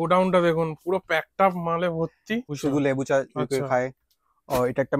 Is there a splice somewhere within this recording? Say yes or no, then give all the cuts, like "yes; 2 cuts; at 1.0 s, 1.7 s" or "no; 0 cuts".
yes; 1 cut; at 2.5 s